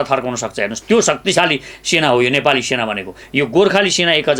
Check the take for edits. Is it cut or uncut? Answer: cut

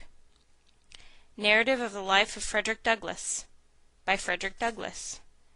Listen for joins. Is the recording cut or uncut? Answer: cut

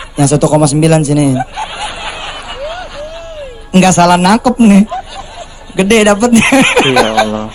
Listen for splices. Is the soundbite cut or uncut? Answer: uncut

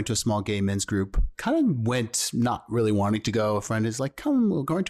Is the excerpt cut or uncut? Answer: cut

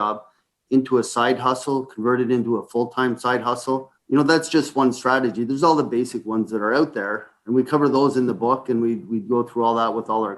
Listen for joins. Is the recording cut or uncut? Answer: cut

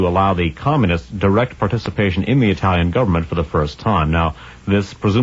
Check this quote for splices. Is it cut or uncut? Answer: cut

